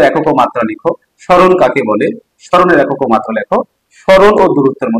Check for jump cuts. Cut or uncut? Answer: uncut